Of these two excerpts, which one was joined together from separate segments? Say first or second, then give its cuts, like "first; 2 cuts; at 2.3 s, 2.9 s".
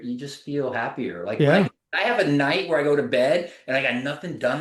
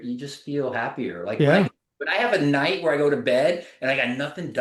first; 1 cut; at 1.8 s